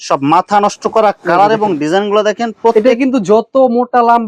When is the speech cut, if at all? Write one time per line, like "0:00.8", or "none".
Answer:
none